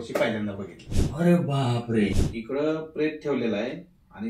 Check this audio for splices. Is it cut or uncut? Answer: cut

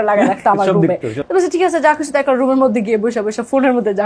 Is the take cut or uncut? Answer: cut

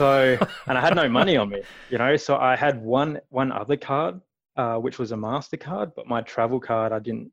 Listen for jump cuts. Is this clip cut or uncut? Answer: uncut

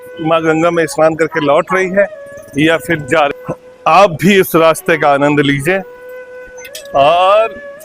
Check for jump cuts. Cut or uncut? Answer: cut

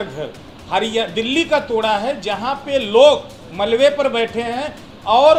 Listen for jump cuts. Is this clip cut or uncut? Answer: uncut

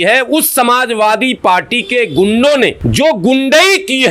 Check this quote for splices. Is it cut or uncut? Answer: cut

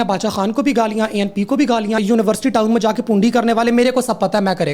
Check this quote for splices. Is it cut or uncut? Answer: cut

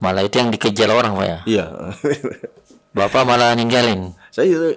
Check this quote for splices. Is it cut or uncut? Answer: uncut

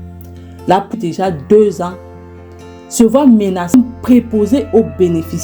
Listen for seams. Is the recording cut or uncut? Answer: cut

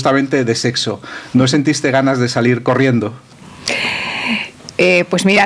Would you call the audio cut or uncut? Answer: uncut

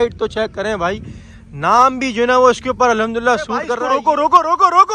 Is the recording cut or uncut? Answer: cut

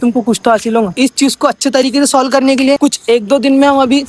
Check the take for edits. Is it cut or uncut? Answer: cut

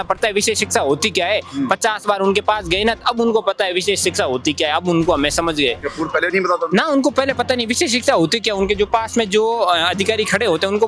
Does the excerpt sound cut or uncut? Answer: uncut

